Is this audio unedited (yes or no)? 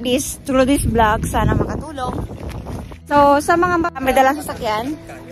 no